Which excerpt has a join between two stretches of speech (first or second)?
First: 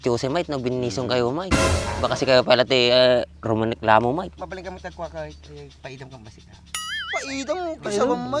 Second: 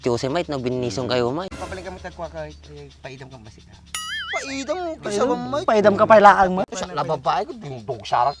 second